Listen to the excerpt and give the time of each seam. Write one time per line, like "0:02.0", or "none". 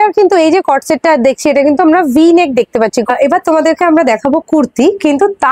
0:03.1